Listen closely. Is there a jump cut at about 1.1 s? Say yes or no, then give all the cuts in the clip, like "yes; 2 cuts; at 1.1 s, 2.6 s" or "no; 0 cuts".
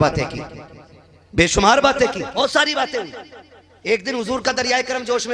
no; 1 cut; at 2.4 s